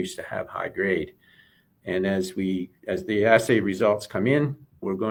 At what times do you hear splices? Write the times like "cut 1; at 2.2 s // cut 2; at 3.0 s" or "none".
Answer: none